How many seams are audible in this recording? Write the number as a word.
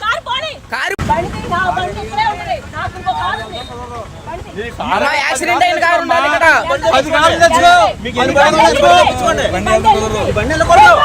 one